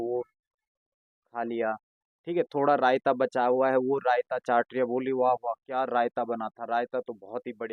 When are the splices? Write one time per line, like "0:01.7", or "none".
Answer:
none